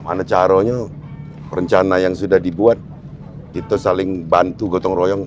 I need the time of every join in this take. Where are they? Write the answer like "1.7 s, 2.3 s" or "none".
none

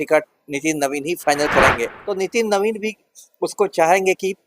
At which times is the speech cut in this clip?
1.9 s

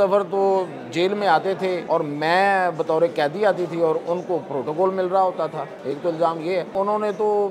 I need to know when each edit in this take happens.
1.8 s, 5.7 s, 6.7 s

